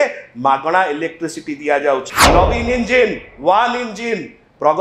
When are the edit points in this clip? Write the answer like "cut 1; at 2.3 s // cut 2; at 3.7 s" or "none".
cut 1; at 2.2 s